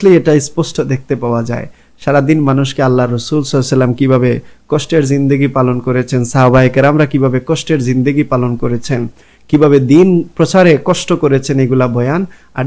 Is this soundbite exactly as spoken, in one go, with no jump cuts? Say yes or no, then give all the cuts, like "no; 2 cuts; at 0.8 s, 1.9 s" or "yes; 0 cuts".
yes; 0 cuts